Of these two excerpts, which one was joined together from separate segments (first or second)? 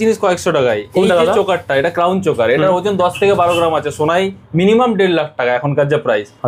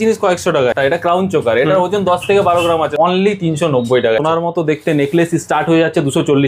second